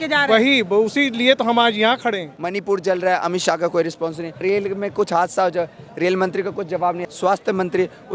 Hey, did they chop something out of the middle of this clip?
yes; 3 cuts; at 2.3 s, 4.4 s, 7.0 s

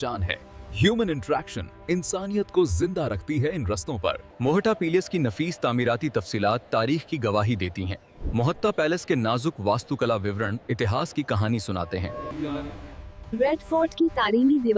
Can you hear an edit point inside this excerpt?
yes; 2 cuts; at 4.3 s, 12.2 s

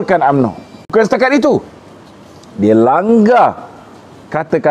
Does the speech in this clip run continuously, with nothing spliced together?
no; 1 cut; at 0.9 s

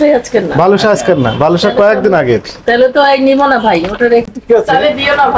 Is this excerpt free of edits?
no; 1 cut; at 4.2 s

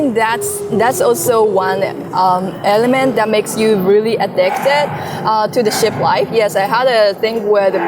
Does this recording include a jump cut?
no; 0 cuts

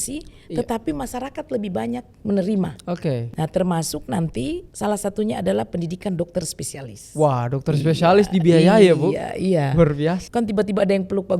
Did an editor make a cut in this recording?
yes; 3 cuts; at 3.3 s, 4.6 s, 10.2 s

